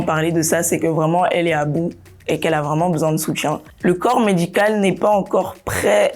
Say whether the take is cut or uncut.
cut